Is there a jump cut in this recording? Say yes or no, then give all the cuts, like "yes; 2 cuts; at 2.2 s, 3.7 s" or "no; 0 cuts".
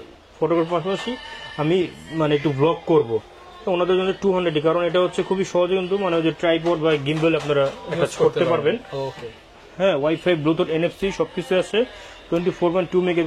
no; 0 cuts